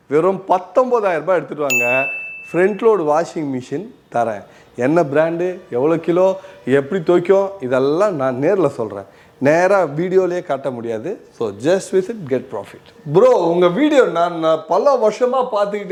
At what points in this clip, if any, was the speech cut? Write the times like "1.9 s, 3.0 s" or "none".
none